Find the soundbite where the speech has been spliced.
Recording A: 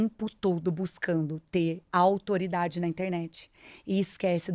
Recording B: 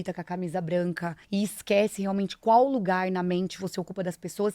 B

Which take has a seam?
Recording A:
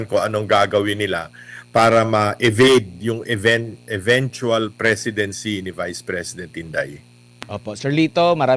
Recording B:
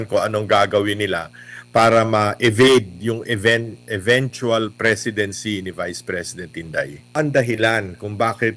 B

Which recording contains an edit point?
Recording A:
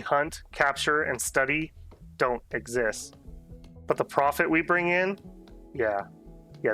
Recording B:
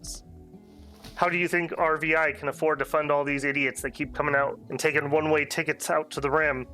B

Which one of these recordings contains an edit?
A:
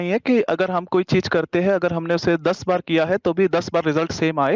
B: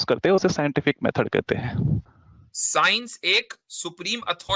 B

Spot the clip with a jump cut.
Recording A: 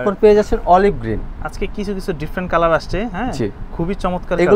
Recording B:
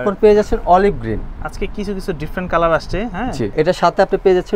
B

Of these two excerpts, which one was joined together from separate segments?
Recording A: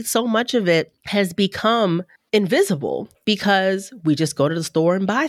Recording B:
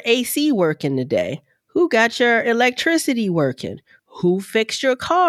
A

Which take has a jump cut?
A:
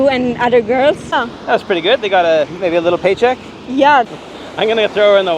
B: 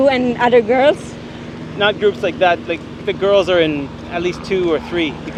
A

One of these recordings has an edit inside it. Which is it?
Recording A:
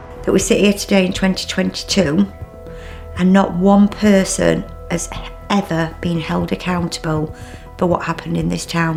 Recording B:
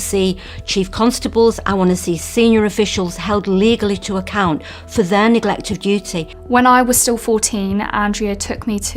B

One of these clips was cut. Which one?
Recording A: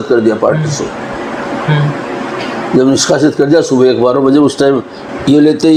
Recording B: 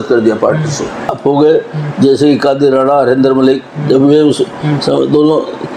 B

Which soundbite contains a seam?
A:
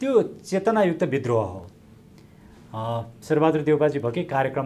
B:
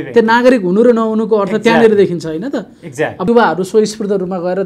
B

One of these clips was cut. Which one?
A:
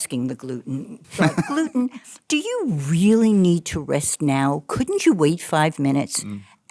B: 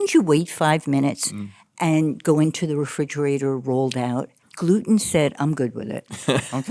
A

